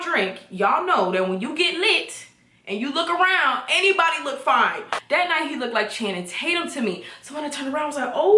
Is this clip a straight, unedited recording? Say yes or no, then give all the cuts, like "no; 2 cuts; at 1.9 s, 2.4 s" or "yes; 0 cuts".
yes; 0 cuts